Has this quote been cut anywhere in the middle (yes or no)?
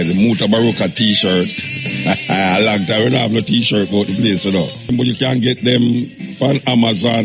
yes